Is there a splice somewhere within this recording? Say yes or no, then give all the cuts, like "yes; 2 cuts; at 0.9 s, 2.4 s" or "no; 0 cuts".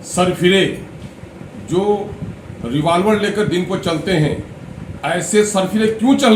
no; 0 cuts